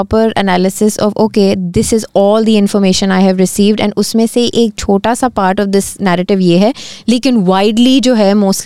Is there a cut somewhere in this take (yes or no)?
no